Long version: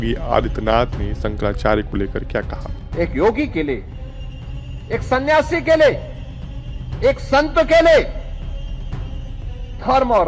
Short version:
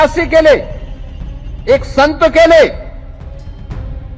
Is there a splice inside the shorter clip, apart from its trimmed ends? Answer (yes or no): no